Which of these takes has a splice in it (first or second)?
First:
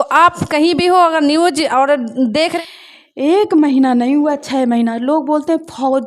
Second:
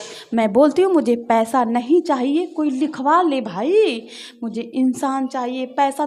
first